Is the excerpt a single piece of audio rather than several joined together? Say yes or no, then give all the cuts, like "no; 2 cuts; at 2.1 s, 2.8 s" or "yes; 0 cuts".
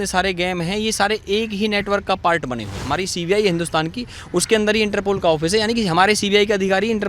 no; 1 cut; at 2.8 s